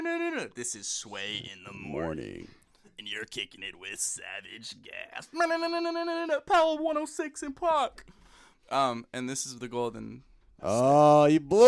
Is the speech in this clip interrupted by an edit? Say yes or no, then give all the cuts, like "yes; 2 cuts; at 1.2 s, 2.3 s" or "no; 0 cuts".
no; 0 cuts